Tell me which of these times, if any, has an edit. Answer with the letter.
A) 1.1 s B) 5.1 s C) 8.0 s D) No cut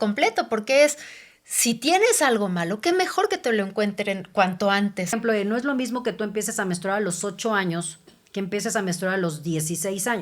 B